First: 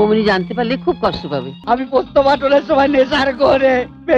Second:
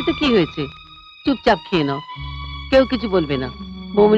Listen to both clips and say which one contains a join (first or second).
first